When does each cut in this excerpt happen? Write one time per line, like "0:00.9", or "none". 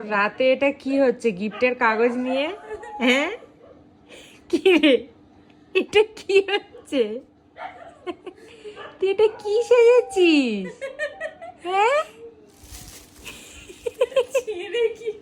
none